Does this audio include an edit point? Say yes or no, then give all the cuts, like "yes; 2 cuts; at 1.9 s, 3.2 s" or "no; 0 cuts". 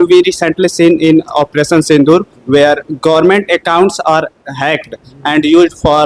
no; 0 cuts